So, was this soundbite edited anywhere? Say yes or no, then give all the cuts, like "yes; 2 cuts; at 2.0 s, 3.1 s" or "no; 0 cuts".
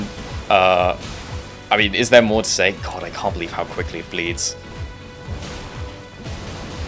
no; 0 cuts